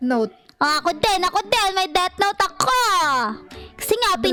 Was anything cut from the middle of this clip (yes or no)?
no